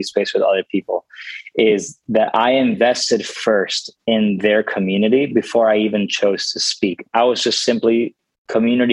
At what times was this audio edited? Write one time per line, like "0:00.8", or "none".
0:07.0

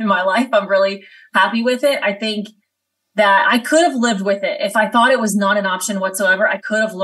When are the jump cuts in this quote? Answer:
none

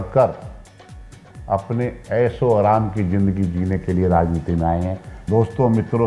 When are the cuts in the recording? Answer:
0:05.1

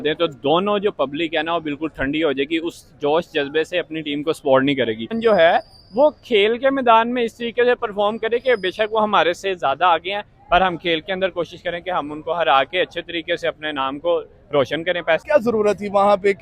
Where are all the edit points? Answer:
0:05.2
0:15.2

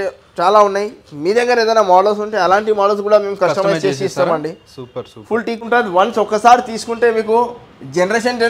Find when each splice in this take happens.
0:05.6

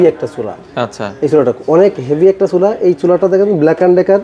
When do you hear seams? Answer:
none

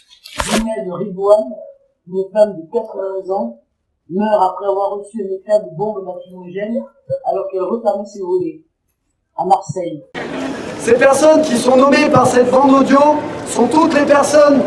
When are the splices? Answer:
none

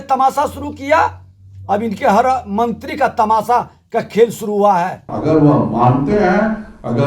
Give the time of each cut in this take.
0:05.1

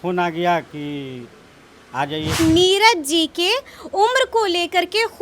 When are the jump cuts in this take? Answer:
0:02.4

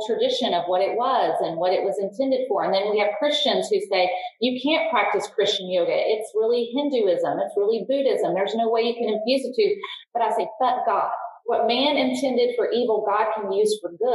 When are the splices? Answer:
0:11.4

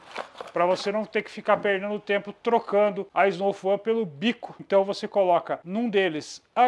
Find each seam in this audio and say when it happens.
0:03.0
0:04.5
0:05.6

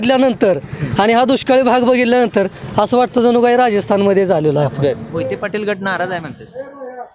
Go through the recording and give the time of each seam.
0:05.1

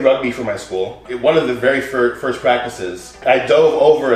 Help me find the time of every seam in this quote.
0:01.0
0:03.2

